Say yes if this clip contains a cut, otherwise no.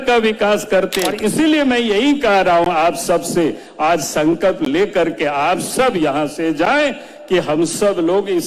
yes